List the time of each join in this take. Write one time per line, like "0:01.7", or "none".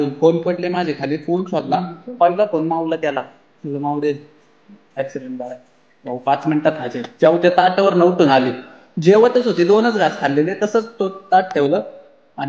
none